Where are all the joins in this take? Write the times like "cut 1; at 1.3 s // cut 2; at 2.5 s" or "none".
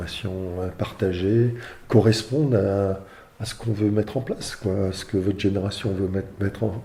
none